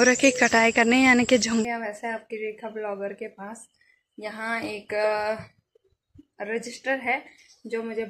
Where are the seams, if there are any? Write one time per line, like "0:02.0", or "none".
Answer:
0:01.7